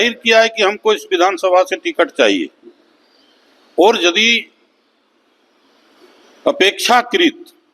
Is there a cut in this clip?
no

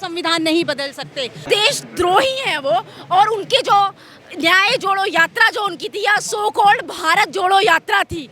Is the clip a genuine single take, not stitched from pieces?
no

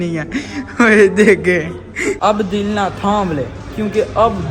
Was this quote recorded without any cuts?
no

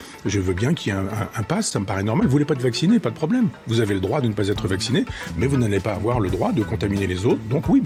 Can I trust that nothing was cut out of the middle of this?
yes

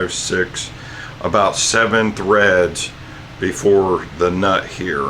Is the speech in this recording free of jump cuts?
yes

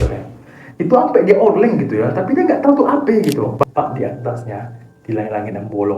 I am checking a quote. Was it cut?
yes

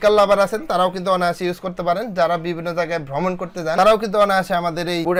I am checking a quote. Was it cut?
no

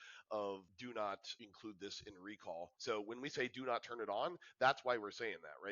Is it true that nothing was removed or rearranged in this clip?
no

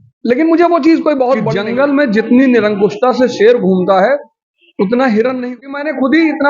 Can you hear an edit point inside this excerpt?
yes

